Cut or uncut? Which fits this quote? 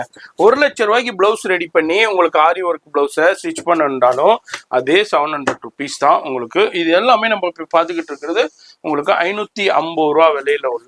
uncut